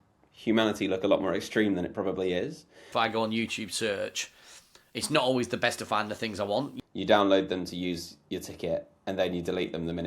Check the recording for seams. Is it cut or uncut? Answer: cut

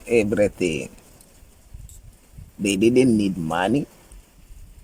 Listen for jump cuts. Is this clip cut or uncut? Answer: uncut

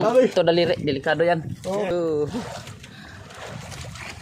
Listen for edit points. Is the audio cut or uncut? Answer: cut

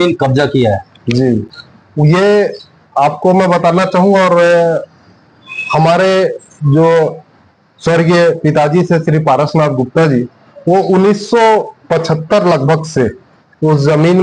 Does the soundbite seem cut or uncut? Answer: uncut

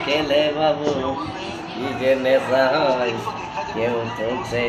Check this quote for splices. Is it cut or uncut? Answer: uncut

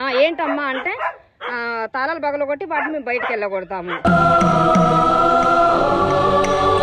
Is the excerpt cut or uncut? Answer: uncut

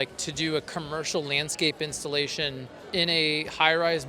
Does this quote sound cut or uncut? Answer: cut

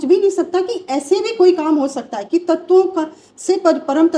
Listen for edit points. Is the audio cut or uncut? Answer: uncut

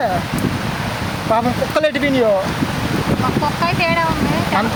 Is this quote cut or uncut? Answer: uncut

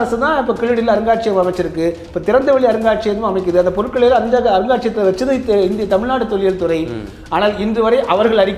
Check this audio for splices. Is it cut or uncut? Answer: uncut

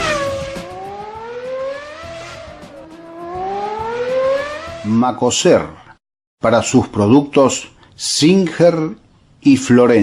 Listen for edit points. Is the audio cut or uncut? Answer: cut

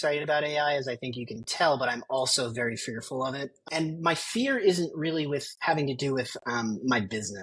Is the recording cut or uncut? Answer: uncut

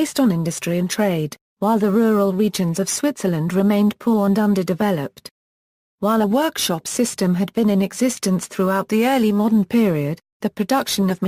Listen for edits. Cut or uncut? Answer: uncut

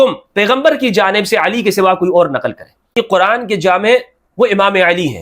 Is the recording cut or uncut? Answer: cut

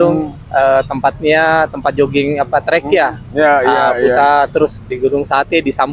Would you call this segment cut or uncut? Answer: uncut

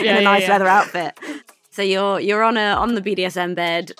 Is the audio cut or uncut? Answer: cut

